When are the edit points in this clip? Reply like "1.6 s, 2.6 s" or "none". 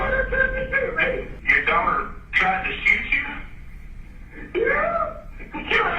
1.4 s